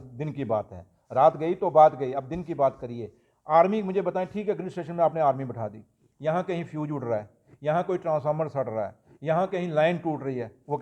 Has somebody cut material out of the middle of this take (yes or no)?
no